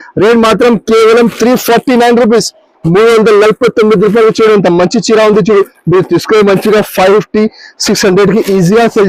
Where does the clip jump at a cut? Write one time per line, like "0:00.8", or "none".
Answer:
none